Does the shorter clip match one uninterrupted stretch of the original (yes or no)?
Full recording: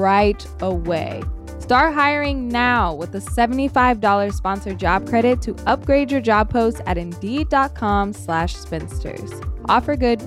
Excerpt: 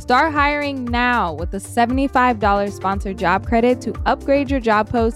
yes